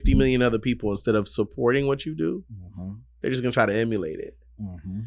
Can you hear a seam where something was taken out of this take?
no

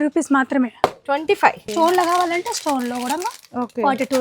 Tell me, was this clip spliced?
yes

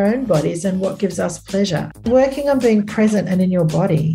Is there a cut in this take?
yes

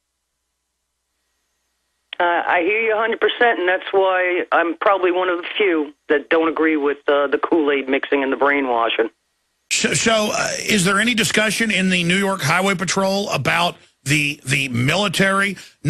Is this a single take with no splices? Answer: no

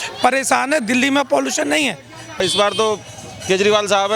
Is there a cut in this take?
yes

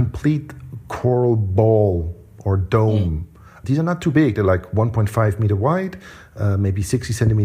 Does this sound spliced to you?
no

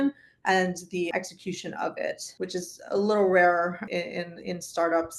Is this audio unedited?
no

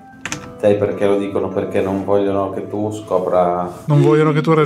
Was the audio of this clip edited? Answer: yes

